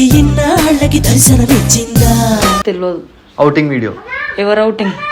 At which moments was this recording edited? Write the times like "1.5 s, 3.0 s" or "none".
2.6 s